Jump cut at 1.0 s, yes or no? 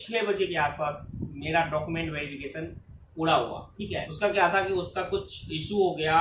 no